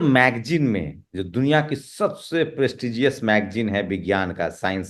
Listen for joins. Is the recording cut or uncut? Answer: uncut